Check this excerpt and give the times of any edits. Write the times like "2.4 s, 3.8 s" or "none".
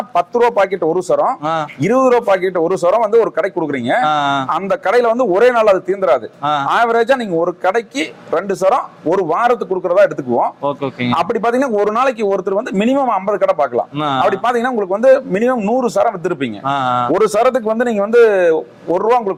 none